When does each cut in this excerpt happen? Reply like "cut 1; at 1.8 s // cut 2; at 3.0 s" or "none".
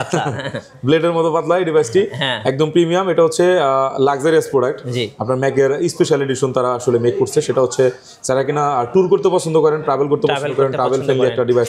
none